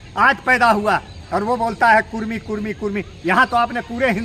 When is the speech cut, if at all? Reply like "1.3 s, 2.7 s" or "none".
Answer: none